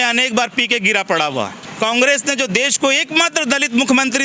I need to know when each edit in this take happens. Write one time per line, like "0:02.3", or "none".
0:01.6